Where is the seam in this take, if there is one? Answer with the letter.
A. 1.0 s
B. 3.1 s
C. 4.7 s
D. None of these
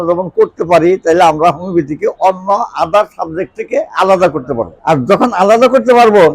C